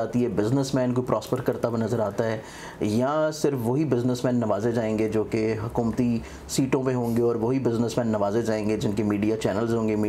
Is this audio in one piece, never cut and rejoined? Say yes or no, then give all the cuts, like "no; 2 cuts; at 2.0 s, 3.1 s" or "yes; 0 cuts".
yes; 0 cuts